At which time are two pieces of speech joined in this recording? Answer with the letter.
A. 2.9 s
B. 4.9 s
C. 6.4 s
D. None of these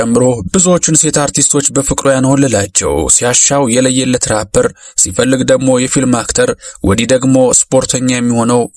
D